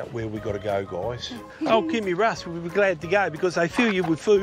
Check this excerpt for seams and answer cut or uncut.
cut